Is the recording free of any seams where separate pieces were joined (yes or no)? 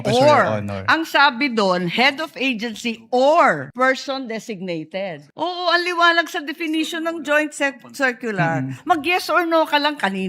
no